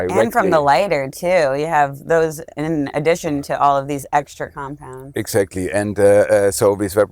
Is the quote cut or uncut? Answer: uncut